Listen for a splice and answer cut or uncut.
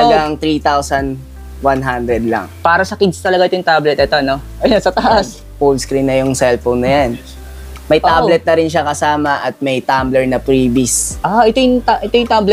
cut